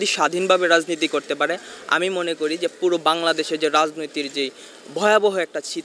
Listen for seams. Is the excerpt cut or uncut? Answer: uncut